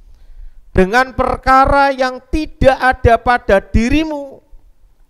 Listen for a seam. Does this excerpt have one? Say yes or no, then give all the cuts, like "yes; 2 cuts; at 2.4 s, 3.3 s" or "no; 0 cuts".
no; 0 cuts